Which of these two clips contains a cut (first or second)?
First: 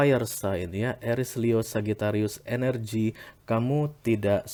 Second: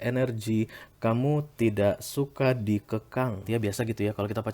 second